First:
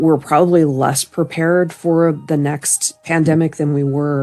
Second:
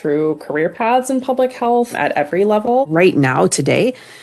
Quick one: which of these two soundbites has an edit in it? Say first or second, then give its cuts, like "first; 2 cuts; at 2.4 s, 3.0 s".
second; 2 cuts; at 1.9 s, 2.9 s